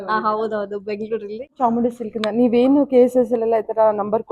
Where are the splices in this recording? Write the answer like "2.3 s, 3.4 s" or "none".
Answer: 1.5 s

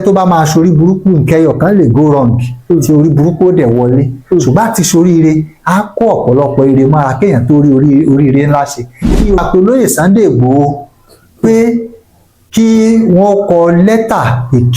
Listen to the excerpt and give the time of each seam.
9.4 s

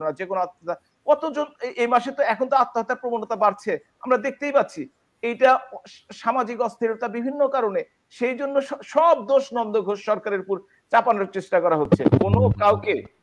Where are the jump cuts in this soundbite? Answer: 11.8 s

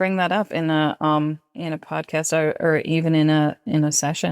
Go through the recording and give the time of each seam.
1.5 s

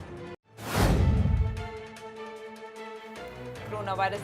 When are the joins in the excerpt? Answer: 3.2 s

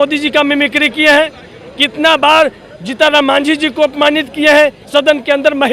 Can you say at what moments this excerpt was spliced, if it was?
4.8 s

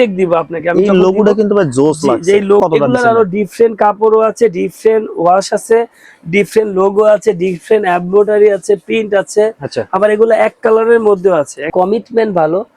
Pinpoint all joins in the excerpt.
2.6 s, 11.7 s

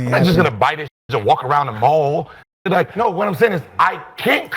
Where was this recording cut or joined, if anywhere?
2.9 s

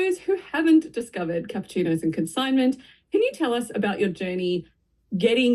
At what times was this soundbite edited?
none

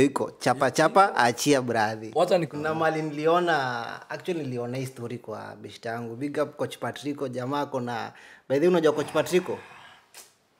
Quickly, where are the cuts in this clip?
2.5 s

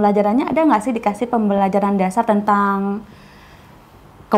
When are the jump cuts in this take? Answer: none

